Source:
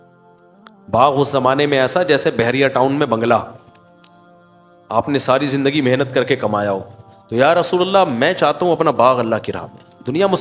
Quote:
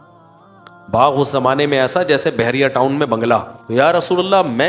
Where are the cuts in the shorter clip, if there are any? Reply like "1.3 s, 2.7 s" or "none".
3.6 s